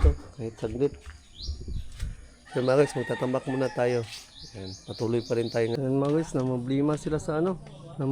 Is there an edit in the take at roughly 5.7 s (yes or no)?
yes